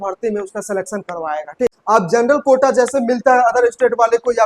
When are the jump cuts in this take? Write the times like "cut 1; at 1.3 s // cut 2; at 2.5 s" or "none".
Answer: cut 1; at 1.8 s